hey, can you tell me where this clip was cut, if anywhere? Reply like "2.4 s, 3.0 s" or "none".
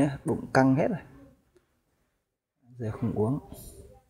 1.0 s